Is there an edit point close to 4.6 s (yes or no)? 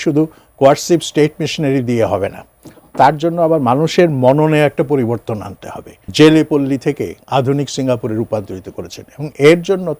no